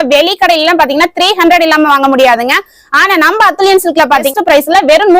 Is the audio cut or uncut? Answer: cut